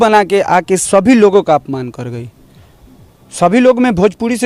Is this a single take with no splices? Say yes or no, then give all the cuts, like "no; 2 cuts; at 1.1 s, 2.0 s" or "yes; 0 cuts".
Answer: yes; 0 cuts